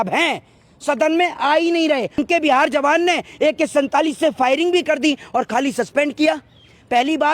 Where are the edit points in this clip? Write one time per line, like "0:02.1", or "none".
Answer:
0:02.2